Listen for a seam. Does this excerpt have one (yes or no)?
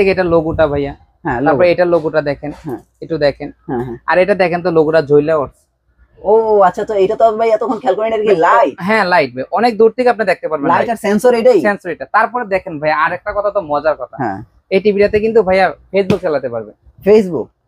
no